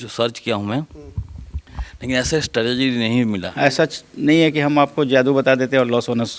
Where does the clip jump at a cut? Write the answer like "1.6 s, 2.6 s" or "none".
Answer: 3.5 s